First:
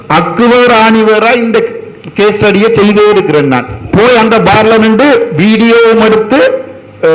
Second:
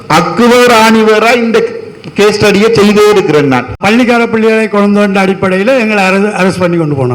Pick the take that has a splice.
second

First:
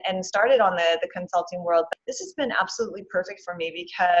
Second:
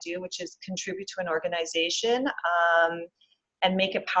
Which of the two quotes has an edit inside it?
first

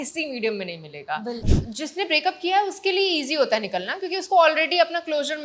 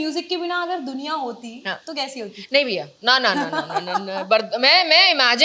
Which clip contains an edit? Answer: first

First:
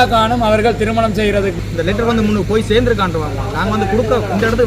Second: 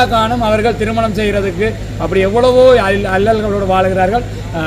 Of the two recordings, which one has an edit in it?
first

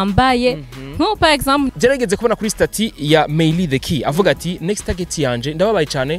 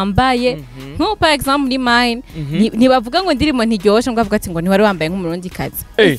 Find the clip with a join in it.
first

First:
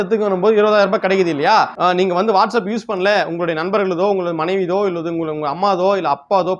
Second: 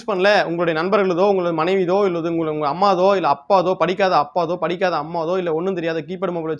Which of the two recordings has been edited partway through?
first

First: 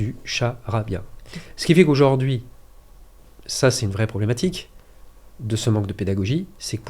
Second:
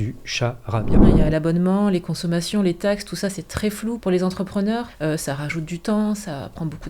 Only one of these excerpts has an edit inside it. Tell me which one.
second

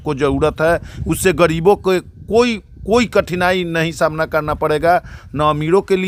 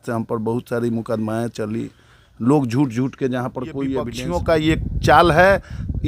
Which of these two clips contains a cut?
second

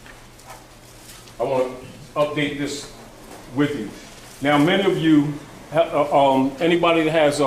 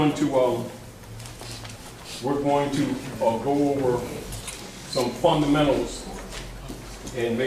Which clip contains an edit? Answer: first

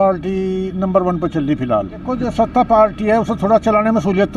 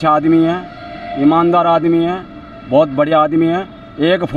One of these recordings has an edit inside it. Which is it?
first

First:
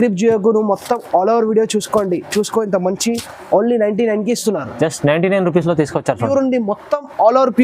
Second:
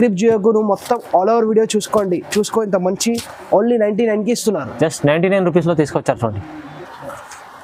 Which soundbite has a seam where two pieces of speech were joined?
first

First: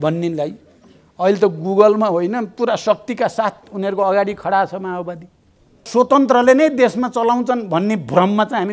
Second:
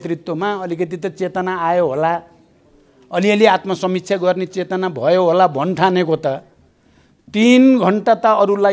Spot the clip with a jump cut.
first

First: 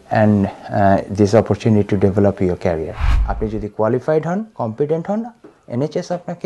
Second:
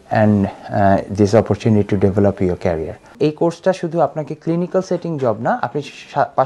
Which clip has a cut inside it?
first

